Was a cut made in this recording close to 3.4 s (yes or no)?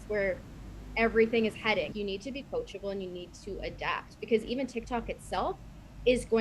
no